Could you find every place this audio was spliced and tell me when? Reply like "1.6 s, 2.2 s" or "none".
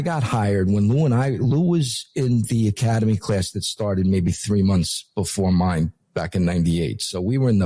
none

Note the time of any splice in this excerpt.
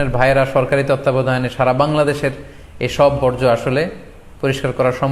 none

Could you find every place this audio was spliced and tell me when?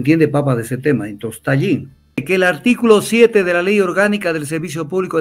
2.2 s

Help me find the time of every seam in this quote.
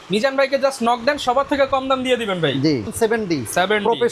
2.9 s

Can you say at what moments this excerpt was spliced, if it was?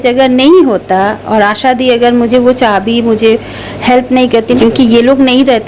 4.6 s

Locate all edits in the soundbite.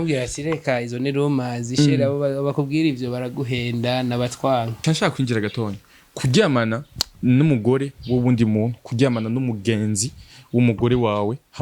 4.7 s

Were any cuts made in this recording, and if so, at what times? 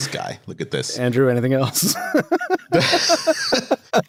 none

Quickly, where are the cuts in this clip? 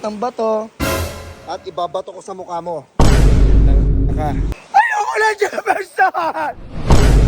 4.5 s

